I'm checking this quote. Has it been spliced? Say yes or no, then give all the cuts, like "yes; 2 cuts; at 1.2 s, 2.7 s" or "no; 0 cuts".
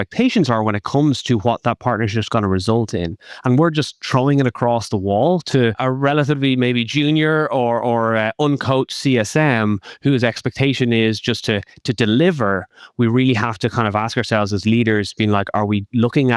yes; 1 cut; at 5.8 s